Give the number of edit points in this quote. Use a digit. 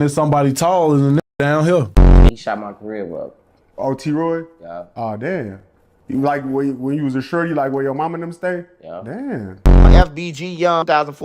1